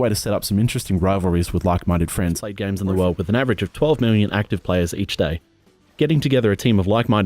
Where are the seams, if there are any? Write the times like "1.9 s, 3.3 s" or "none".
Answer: 2.7 s